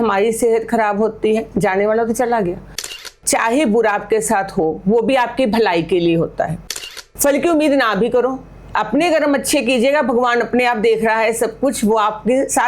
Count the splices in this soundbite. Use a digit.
2